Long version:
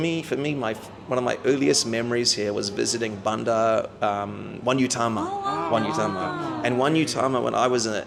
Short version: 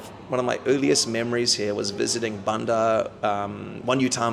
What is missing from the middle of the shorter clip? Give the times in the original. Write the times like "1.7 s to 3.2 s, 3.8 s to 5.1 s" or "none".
none

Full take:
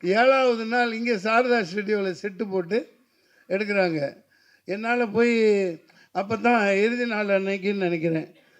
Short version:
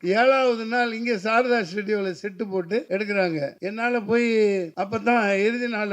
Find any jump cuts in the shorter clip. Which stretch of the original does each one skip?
2.9 s to 3.5 s, 4.2 s to 4.6 s, 5.8 s to 6.1 s

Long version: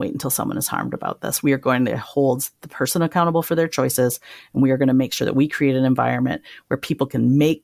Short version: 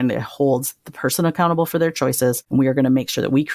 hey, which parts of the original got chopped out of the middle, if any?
4.2 s to 4.5 s

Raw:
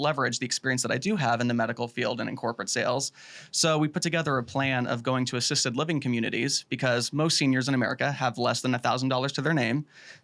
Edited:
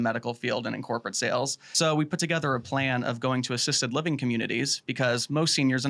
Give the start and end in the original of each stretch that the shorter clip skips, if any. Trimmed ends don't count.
3.2 s to 3.5 s

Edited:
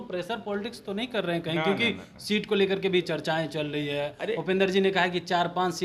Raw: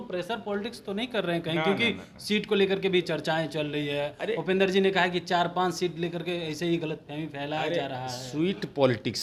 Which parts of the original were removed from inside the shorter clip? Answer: none

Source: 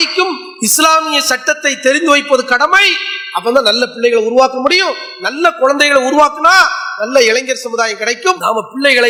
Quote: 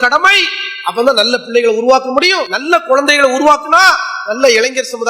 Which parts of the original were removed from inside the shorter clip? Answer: 5.0 s to 5.2 s

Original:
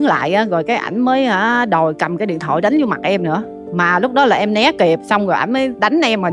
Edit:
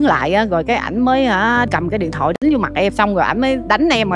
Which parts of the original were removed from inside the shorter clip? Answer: 1.7 s to 1.9 s, 3.2 s to 5.0 s

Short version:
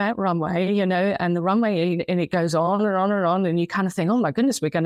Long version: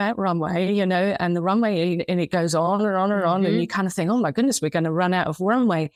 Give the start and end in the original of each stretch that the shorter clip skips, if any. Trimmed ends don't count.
none

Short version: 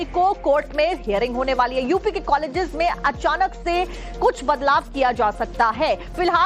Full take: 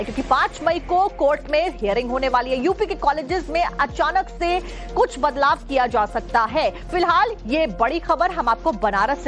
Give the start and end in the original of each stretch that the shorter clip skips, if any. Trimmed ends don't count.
none

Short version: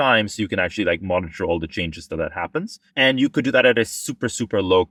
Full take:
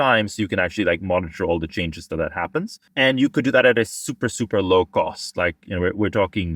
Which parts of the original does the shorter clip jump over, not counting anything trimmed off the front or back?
none

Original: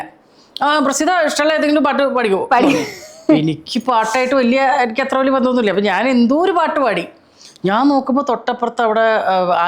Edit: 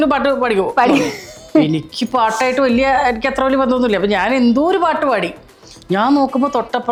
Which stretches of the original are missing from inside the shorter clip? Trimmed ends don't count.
none

